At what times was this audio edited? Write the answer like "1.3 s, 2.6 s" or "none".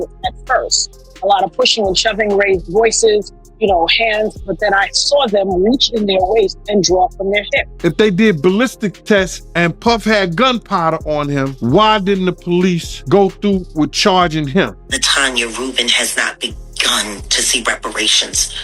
7.6 s, 9.4 s, 11.5 s, 12.9 s, 14.8 s